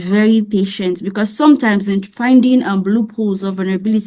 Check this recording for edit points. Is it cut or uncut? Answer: uncut